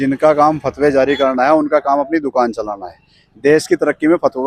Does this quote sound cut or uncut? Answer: uncut